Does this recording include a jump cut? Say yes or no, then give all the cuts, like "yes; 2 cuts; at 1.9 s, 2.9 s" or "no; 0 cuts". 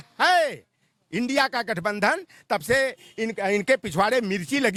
no; 0 cuts